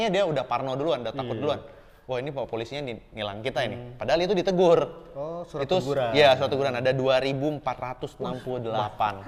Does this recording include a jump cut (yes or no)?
no